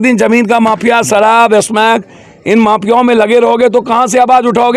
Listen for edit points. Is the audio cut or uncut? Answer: uncut